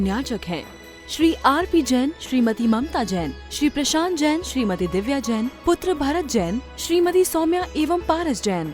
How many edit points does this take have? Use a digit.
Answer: 0